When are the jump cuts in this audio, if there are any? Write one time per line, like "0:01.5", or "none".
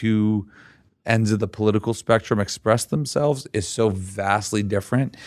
none